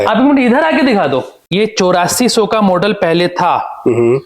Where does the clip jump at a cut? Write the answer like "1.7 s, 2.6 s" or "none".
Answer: 1.4 s